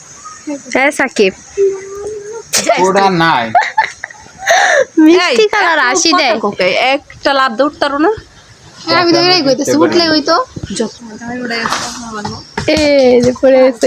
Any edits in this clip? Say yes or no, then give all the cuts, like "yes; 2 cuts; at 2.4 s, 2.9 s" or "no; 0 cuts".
yes; 1 cut; at 11.0 s